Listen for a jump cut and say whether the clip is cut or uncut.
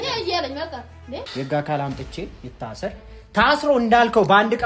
cut